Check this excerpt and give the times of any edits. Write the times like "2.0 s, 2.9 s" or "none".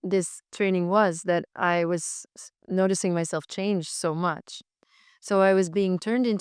none